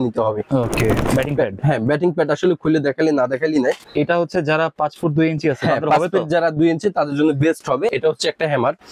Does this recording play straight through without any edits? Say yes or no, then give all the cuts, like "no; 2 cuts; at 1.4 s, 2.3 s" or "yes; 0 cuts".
no; 3 cuts; at 1.0 s, 3.8 s, 7.9 s